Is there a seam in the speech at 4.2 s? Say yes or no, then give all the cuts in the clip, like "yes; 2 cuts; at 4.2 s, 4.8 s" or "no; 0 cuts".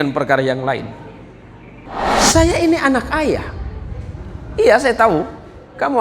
no; 1 cut; at 1.8 s